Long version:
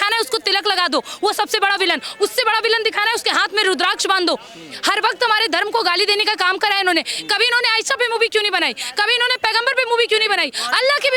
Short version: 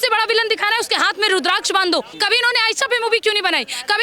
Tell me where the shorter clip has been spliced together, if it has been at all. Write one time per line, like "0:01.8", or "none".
0:02.1

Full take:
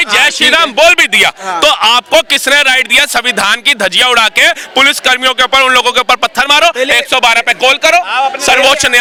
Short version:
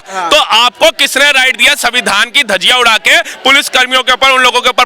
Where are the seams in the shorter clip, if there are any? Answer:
none

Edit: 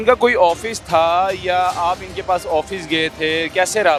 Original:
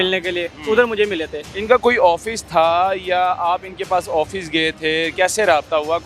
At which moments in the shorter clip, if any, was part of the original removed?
none

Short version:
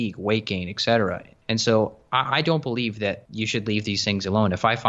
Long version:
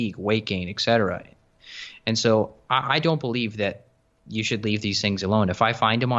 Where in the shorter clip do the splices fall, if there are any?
0:01.3
0:03.3

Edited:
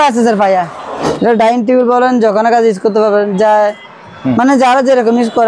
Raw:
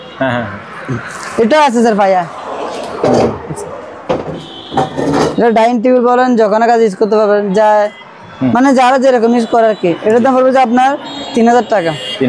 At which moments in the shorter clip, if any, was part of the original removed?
0:01.1

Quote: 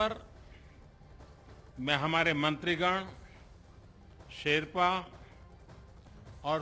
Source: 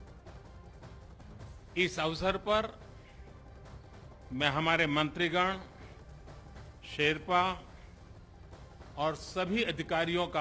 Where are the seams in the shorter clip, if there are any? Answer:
none

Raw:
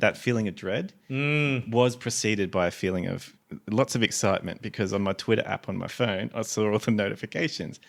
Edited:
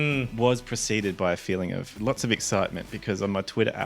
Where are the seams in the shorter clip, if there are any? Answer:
0:01.9

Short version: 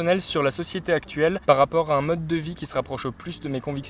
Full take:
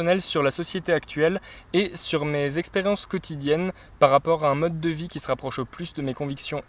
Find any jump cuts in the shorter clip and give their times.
0:01.4

